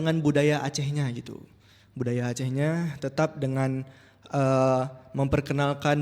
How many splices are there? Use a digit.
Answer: 0